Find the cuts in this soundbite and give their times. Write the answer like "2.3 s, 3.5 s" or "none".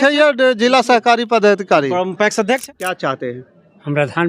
2.9 s